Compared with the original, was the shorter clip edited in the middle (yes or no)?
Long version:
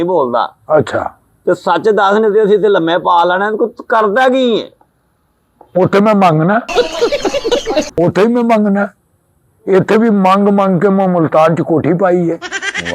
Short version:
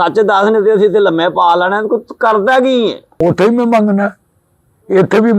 yes